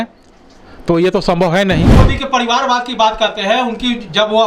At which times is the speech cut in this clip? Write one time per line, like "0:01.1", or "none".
0:02.0